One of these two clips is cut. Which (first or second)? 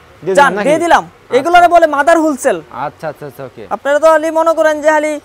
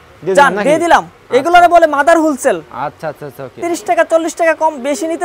second